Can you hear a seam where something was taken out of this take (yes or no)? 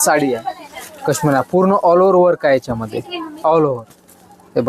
no